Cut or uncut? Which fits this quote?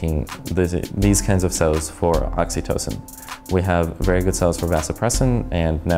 uncut